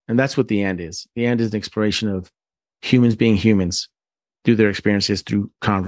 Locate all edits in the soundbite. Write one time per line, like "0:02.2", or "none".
none